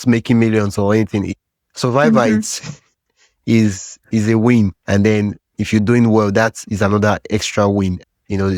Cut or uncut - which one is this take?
uncut